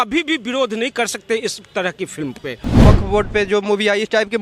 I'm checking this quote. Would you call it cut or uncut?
cut